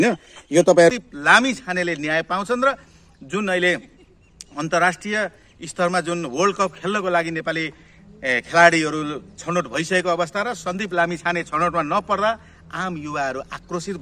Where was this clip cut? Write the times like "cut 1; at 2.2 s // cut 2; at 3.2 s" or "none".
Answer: cut 1; at 0.9 s